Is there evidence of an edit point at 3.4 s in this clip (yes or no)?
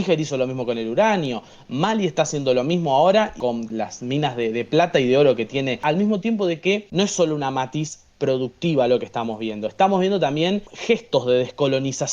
yes